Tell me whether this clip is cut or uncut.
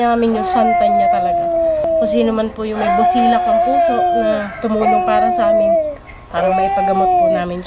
cut